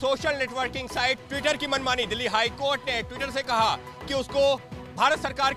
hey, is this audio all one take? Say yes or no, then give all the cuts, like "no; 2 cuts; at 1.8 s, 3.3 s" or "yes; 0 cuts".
yes; 0 cuts